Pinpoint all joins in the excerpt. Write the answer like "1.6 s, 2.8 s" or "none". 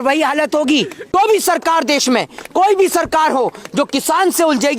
1.1 s